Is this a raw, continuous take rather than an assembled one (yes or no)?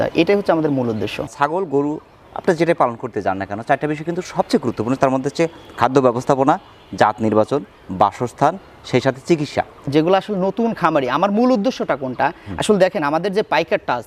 no